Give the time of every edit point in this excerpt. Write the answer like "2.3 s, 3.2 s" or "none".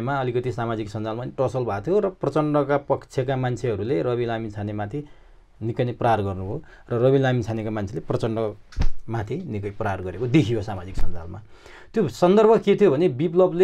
none